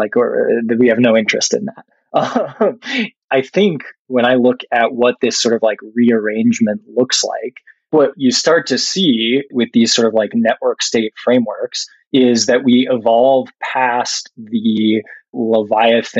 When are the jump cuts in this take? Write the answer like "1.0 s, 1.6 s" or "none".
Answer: 3.1 s, 7.9 s, 9.5 s, 15.3 s

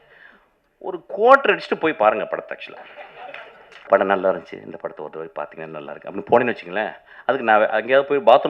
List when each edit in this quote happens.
3.9 s

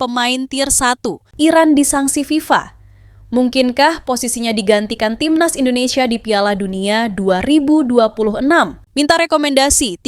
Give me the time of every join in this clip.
1.2 s, 8.8 s

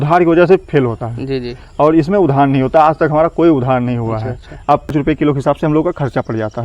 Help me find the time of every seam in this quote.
4.9 s

